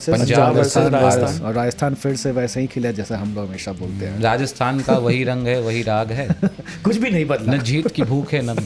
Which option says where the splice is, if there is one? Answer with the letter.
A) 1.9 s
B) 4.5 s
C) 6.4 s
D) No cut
D